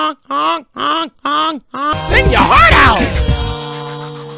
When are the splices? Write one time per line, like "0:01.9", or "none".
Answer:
0:02.0